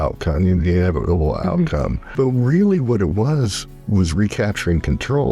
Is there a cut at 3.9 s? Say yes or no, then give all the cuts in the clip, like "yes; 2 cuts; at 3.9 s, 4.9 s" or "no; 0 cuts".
no; 1 cut; at 2.1 s